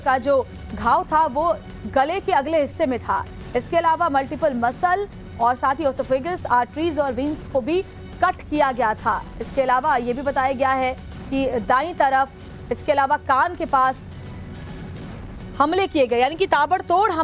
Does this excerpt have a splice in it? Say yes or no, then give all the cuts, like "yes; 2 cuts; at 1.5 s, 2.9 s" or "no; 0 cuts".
yes; 1 cut; at 7.4 s